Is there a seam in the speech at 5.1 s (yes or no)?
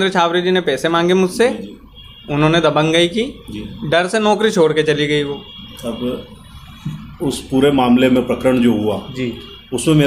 no